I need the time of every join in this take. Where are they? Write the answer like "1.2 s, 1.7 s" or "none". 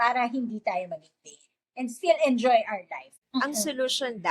3.4 s